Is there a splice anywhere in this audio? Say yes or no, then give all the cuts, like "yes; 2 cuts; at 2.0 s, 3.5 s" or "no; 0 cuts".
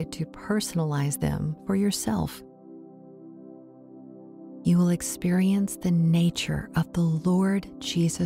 yes; 2 cuts; at 2.3 s, 4.6 s